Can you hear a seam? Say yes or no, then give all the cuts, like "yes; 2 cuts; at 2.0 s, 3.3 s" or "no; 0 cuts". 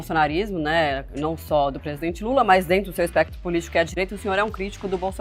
no; 0 cuts